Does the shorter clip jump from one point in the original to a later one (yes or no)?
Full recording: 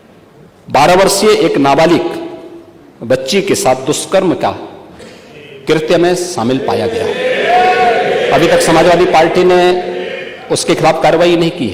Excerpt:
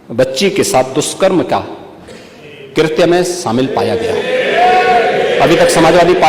no